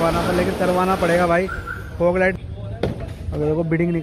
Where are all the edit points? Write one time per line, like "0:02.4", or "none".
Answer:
0:02.3